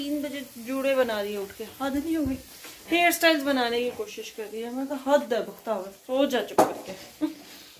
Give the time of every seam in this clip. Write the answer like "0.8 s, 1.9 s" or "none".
none